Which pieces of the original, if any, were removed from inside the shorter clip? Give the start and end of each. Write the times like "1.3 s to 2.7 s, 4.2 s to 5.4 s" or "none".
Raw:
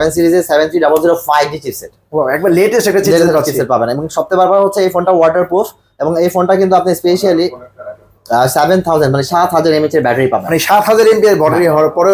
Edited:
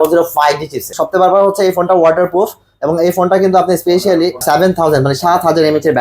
1.8 s to 4.1 s, 7.6 s to 8.5 s